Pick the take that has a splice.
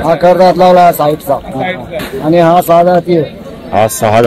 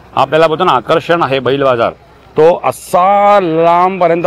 first; 1 cut; at 2.0 s

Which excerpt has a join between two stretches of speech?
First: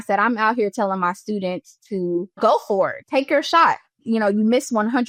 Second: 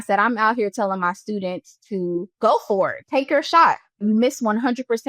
second; 1 cut; at 4.0 s

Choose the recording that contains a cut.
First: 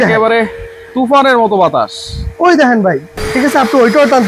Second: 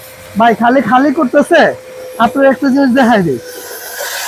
first; 1 cut; at 3.2 s

